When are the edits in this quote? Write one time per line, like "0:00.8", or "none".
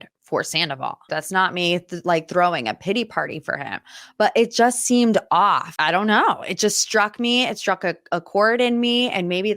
0:01.1
0:05.7